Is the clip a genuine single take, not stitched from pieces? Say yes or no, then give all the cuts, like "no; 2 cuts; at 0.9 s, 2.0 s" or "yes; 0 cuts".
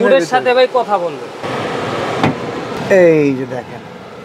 no; 2 cuts; at 1.4 s, 2.8 s